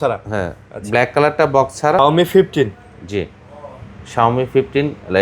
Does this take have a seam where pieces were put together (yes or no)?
yes